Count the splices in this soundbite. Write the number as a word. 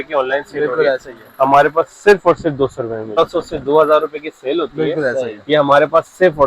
one